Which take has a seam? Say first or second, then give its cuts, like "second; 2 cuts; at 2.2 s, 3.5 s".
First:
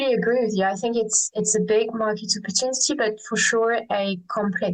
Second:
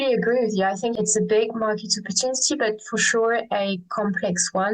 second; 1 cut; at 0.9 s